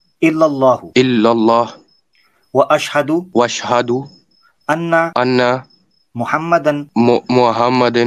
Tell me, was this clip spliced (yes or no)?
yes